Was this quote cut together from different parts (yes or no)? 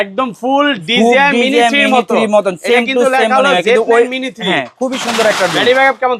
no